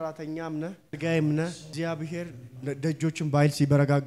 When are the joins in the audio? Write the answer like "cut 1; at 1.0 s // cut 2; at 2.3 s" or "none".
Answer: cut 1; at 1.0 s // cut 2; at 1.7 s